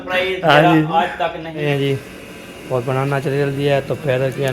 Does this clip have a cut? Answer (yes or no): yes